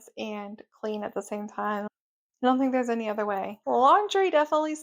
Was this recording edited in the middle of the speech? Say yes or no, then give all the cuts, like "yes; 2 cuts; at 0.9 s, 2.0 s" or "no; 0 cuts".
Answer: yes; 1 cut; at 3.5 s